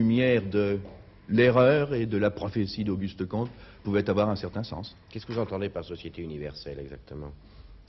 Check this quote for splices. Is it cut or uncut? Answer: cut